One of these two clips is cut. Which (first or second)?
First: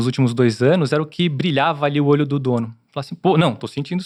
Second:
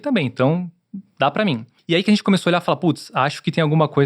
second